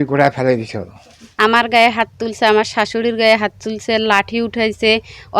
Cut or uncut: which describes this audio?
cut